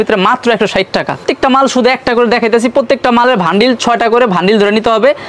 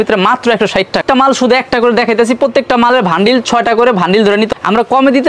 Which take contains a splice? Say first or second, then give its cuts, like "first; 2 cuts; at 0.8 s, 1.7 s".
second; 2 cuts; at 1.0 s, 4.5 s